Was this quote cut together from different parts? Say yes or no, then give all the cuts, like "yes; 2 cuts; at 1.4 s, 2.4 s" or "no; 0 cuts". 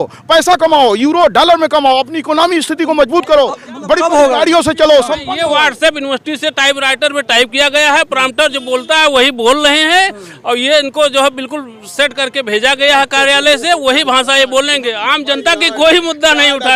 no; 0 cuts